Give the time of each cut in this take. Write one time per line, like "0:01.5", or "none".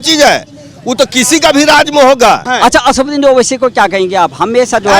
0:02.5

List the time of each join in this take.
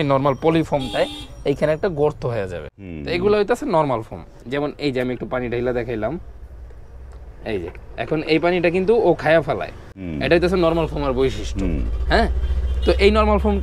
0:04.4

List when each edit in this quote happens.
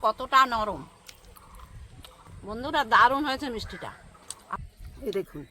0:02.3
0:04.6

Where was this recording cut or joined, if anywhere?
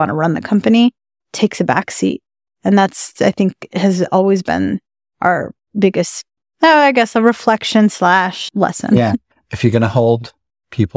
0:06.4
0:09.3

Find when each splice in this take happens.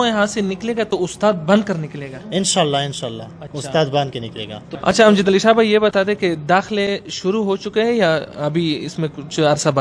none

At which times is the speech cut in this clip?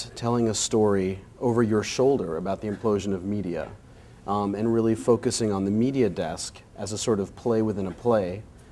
none

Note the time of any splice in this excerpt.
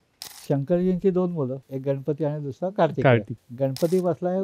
0:01.7
0:03.4

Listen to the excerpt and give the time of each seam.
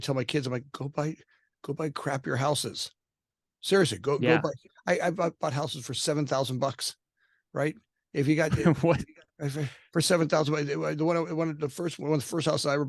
none

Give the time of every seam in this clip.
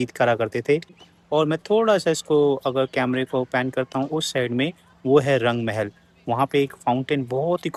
none

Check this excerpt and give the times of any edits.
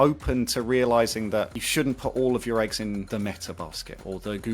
0:01.6
0:03.1

